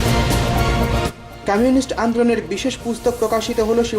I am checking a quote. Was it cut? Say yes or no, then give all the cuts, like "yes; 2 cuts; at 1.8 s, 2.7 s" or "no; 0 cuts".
no; 0 cuts